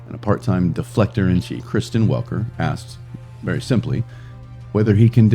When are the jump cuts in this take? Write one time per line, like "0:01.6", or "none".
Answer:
0:01.6